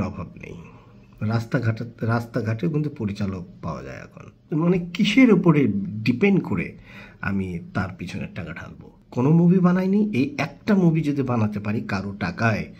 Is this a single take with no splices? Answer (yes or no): no